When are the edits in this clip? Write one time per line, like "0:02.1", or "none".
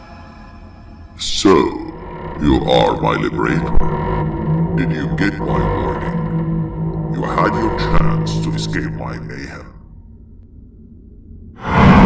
none